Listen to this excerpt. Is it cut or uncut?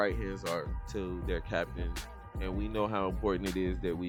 uncut